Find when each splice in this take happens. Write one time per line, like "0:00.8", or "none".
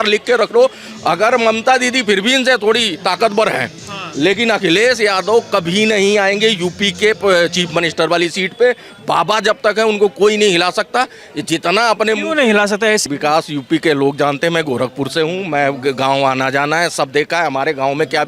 0:13.0

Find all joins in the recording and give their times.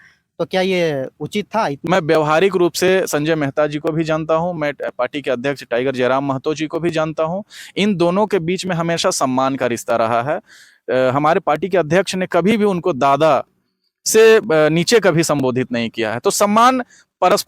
0:01.8

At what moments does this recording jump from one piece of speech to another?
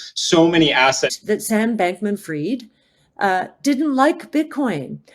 0:01.2

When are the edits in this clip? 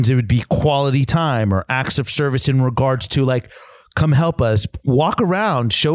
none

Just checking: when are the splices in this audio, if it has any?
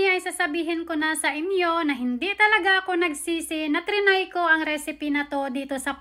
none

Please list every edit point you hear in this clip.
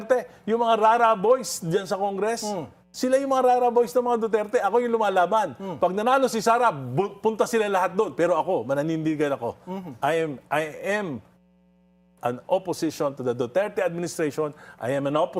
none

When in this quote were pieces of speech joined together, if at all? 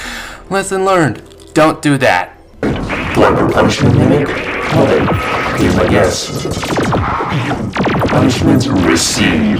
0:02.6

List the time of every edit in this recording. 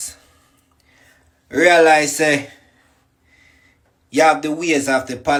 none

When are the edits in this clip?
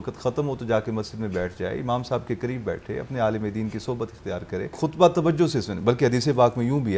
0:04.8

